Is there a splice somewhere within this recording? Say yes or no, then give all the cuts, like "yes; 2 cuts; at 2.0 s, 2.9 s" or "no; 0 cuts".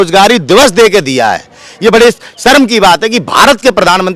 no; 0 cuts